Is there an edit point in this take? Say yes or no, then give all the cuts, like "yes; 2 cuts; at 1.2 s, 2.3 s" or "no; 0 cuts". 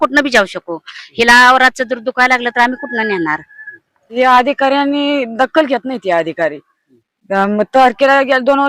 yes; 1 cut; at 4.2 s